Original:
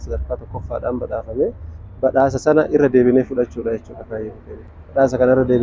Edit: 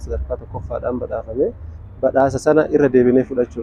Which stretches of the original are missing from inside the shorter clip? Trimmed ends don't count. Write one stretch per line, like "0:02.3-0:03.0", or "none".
none